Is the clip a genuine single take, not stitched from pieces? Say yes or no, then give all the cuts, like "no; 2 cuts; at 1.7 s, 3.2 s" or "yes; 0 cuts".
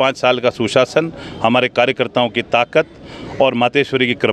yes; 0 cuts